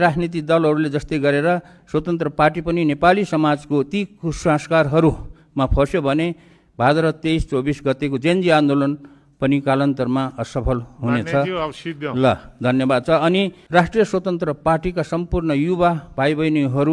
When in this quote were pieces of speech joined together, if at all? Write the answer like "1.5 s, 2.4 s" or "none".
13.6 s

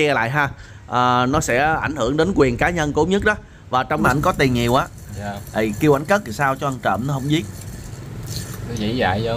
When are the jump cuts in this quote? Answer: 4.0 s

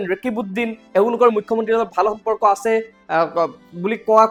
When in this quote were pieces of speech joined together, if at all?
none

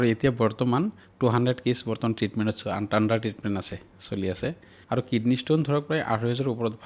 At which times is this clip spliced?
4.8 s

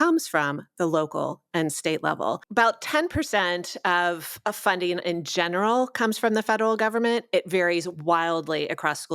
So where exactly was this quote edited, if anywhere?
2.4 s

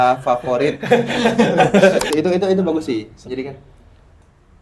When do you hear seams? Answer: 2.0 s

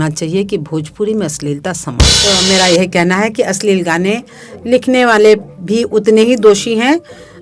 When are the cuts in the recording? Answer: 2.1 s

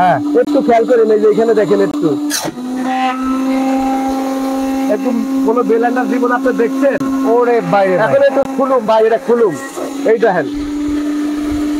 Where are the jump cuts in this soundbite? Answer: none

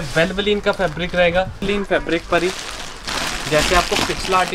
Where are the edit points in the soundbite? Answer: 1.6 s

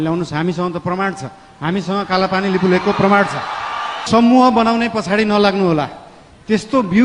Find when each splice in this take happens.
4.0 s

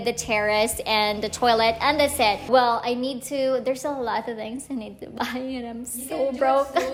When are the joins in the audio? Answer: none

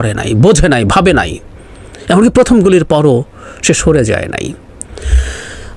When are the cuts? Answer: none

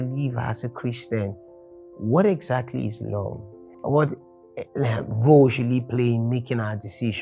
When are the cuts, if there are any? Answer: none

